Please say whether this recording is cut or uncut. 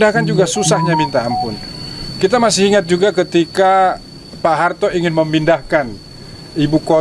uncut